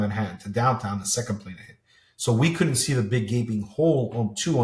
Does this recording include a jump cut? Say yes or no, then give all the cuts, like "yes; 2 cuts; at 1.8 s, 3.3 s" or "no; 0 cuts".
no; 0 cuts